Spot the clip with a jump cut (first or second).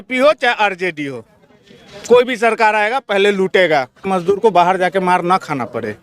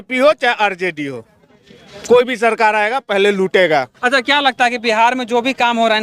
first